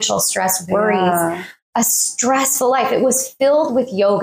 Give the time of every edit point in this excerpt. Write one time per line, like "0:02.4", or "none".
none